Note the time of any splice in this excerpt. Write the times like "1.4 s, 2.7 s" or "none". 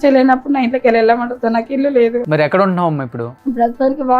2.2 s, 3.2 s